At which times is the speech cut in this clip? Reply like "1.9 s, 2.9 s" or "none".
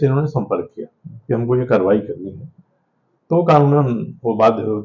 none

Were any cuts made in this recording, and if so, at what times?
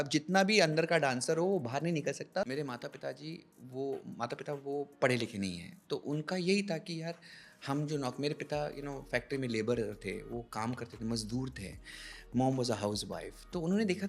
2.5 s

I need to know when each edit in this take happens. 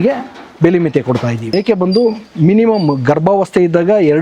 1.5 s

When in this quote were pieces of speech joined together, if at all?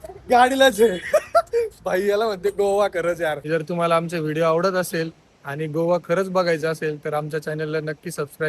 3.4 s

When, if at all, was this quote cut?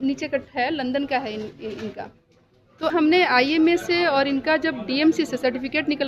2.9 s

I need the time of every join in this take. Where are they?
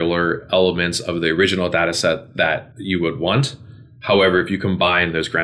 2.7 s

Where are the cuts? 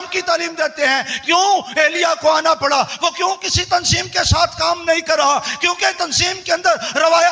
none

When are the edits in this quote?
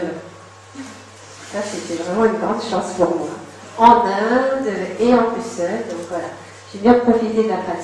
2.6 s

